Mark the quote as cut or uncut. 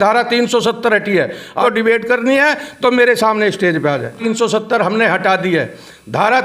cut